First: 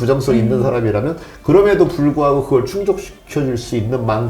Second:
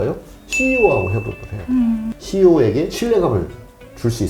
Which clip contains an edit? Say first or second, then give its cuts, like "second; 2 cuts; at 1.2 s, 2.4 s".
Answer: second; 1 cut; at 2.1 s